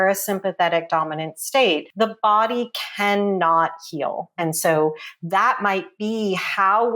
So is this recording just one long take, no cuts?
no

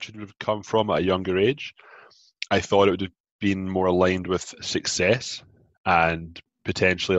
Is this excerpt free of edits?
yes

